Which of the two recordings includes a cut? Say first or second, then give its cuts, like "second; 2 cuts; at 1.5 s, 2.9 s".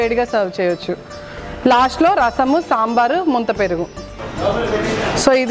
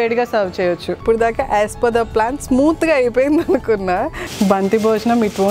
second; 2 cuts; at 1.0 s, 4.2 s